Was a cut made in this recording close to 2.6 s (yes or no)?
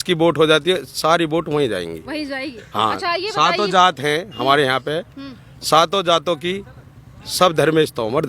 no